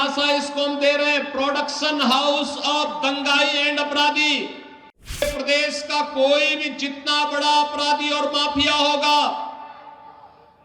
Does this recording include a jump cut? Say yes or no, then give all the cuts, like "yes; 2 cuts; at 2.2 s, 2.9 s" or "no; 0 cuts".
yes; 1 cut; at 5.2 s